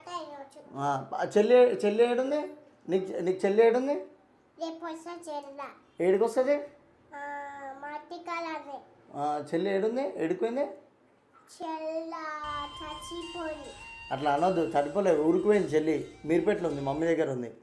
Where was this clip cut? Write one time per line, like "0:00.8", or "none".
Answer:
none